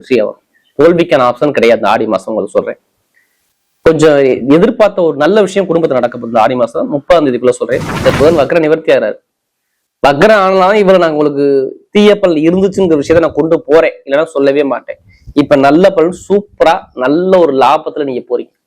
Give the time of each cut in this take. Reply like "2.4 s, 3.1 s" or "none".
8.1 s